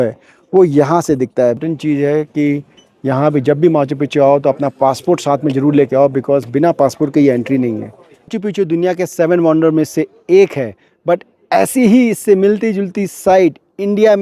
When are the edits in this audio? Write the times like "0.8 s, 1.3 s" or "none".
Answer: 1.6 s, 8.3 s